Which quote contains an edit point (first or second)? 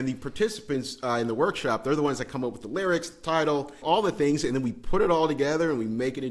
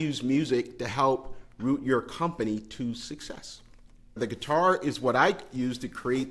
second